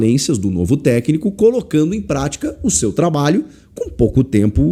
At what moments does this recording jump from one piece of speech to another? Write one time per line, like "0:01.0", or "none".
none

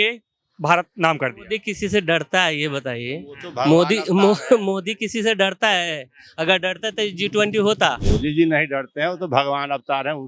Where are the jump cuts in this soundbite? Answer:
0:08.0

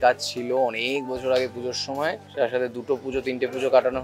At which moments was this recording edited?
0:02.2

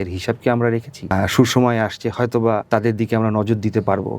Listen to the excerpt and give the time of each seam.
0:01.1
0:02.6

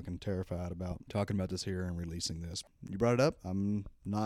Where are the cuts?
0:01.0
0:02.7

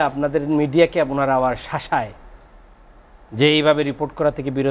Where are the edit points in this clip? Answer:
none

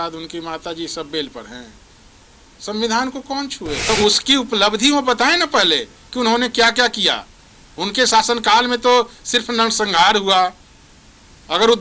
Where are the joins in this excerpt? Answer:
0:03.9

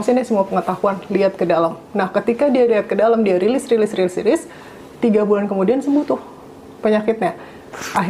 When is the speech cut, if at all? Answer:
none

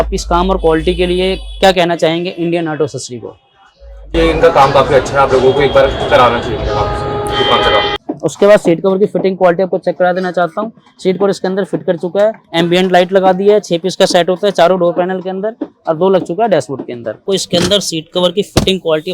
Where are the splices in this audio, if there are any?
0:08.0
0:12.4
0:17.2

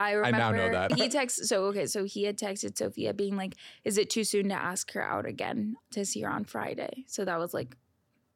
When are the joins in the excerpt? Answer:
0:00.9

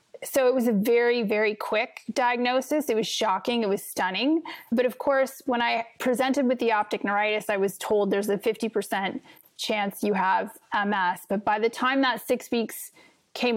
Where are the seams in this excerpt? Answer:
0:04.7

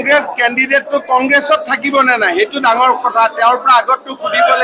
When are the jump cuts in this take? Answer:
none

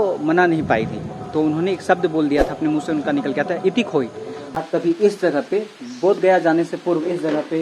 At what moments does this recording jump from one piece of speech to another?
0:04.6

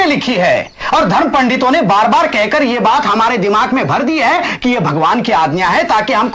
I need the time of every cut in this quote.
none

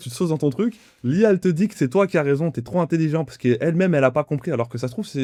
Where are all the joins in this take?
none

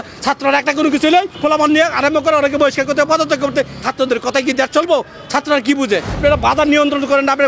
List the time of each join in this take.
0:01.3
0:03.8
0:06.2

